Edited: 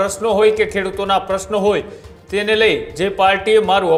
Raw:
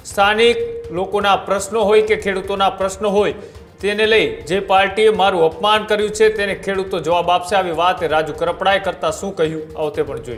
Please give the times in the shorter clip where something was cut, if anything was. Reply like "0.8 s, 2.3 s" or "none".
none